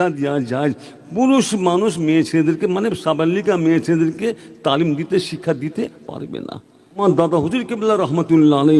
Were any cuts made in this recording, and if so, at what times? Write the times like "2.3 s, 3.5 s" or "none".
7.0 s